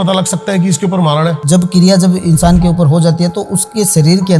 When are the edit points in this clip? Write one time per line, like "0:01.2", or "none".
0:01.4